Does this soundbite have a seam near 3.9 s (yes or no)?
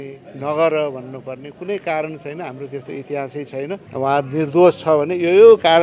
yes